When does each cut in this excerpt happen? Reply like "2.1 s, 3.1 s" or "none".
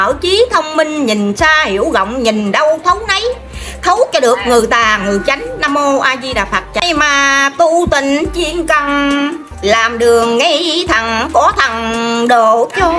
6.8 s